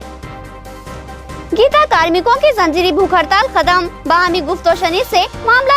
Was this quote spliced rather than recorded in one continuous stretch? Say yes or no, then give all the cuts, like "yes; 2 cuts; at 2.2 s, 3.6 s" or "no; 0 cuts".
no; 0 cuts